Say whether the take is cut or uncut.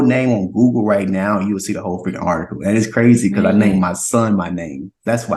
uncut